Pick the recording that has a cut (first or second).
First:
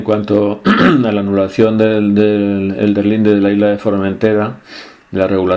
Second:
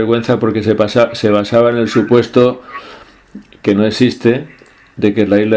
first